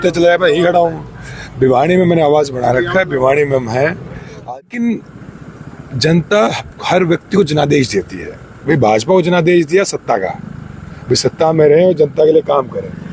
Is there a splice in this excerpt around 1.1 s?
no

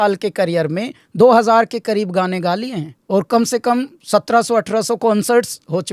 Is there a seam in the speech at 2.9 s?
yes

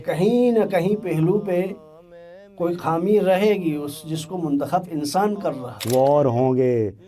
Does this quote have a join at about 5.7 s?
yes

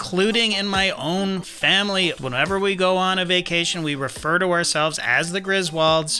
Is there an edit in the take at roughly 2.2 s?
yes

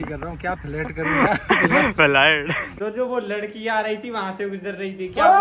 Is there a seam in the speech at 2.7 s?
yes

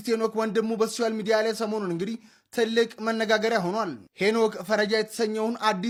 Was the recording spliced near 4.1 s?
no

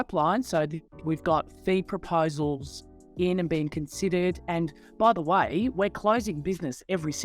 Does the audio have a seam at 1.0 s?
yes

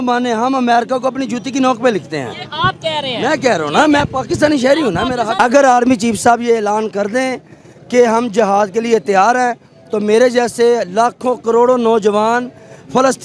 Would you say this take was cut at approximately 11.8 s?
no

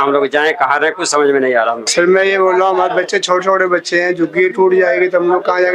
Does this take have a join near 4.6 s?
no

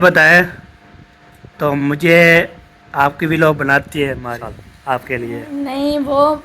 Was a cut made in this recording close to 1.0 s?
no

